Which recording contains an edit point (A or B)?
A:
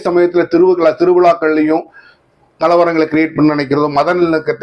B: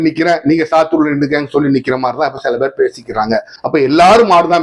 B